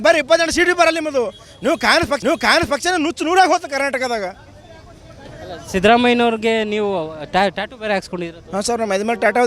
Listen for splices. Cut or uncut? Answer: uncut